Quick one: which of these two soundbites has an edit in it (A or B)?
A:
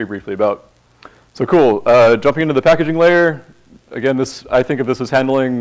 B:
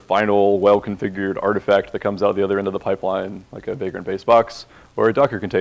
B